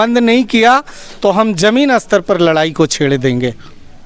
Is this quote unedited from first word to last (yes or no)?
yes